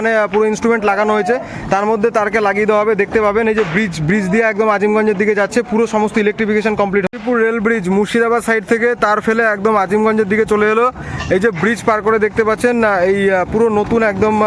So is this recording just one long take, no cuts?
yes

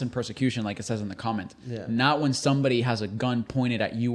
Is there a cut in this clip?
no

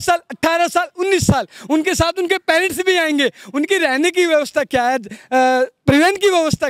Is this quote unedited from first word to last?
yes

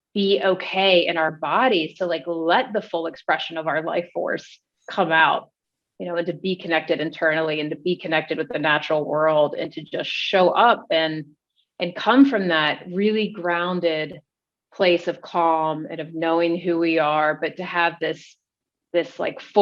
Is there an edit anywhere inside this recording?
no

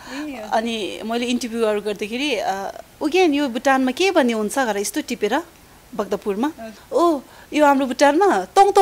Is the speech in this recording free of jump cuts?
no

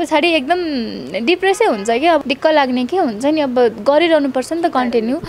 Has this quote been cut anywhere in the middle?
yes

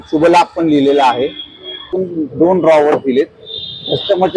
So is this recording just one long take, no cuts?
no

